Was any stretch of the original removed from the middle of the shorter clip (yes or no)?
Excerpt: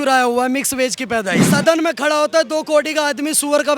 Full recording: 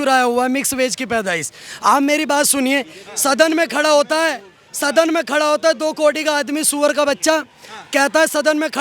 yes